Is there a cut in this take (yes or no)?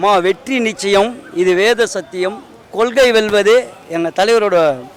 no